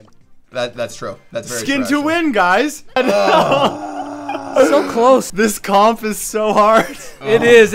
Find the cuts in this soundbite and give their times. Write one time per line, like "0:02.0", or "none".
0:03.0
0:05.3

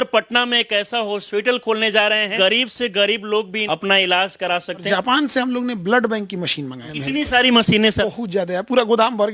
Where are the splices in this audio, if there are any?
0:02.3
0:03.6
0:04.8
0:06.9
0:08.0

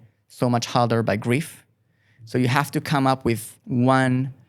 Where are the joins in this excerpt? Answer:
0:03.5

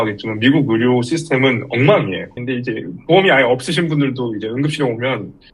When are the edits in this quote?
0:02.4

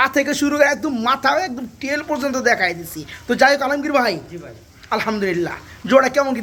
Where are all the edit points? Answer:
none

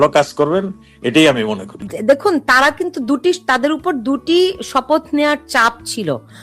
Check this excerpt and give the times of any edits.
0:01.9

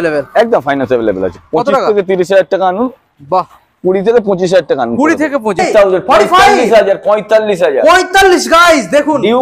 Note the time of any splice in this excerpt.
0:05.6

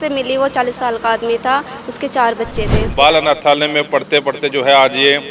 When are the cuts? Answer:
0:02.8

